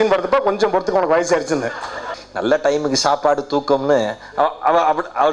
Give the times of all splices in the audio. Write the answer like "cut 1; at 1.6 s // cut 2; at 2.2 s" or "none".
cut 1; at 2.1 s